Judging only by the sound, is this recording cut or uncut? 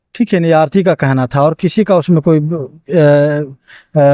uncut